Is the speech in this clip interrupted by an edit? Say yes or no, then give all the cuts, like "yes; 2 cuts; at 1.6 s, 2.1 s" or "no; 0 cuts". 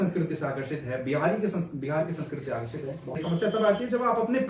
yes; 1 cut; at 3.2 s